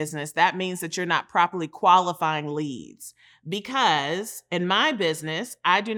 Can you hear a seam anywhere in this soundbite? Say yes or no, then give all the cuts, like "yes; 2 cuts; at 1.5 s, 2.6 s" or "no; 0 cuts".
no; 0 cuts